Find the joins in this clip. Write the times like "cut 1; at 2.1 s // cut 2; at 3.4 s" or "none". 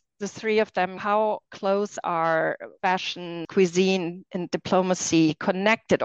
cut 1; at 1.0 s // cut 2; at 3.1 s